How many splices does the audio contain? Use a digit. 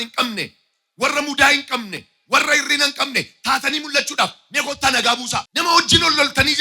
1